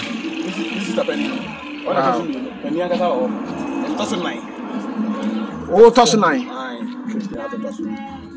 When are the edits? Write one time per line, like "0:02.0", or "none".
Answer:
0:07.3